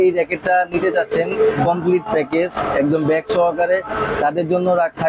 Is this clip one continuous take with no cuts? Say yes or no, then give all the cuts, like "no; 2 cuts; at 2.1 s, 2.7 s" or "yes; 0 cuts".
yes; 0 cuts